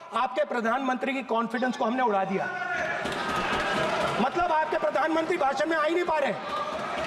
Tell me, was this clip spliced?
no; 0 cuts

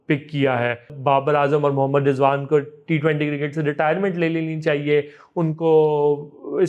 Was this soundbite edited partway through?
yes; 1 cut; at 0.9 s

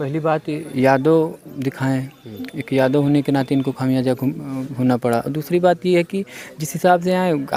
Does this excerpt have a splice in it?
no; 0 cuts

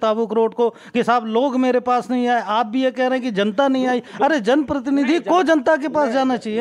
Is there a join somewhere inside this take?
no; 0 cuts

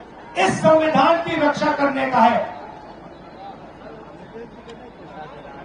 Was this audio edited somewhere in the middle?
no; 0 cuts

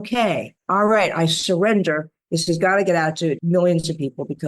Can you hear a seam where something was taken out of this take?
yes; 1 cut; at 3.4 s

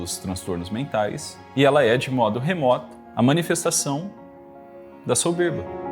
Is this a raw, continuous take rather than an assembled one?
no; 2 cuts; at 1.3 s, 3.0 s

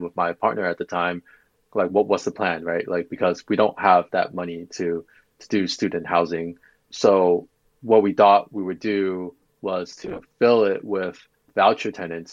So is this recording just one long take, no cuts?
no; 1 cut; at 11.4 s

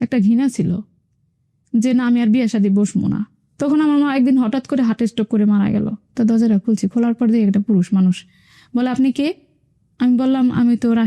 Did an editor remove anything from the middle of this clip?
yes; 2 cuts; at 3.4 s, 6.0 s

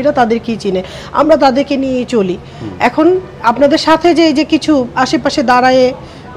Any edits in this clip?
no; 0 cuts

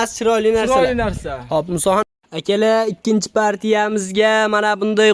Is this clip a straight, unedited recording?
no; 1 cut; at 2.0 s

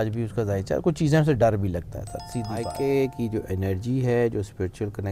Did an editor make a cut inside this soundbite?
yes; 1 cut; at 2.7 s

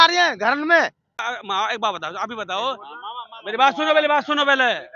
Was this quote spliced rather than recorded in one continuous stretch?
yes; 1 cut; at 1.2 s

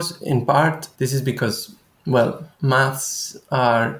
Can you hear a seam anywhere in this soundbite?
no; 0 cuts

